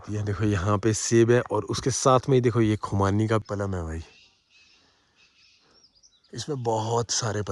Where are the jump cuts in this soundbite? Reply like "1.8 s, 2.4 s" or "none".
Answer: 3.4 s